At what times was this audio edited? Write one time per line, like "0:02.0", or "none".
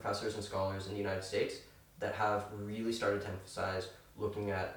none